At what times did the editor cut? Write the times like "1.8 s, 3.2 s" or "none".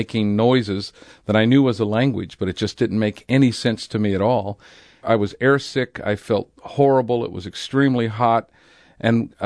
5.0 s